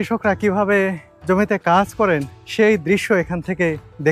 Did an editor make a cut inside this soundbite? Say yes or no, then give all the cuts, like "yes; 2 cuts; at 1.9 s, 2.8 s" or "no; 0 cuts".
yes; 2 cuts; at 1.1 s, 2.4 s